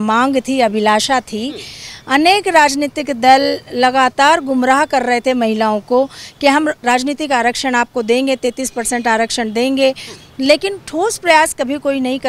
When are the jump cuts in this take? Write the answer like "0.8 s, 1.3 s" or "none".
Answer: 6.8 s